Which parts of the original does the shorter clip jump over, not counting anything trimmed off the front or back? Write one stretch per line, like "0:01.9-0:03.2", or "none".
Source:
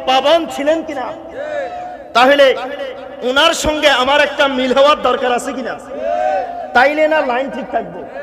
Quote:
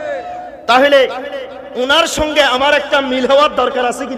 none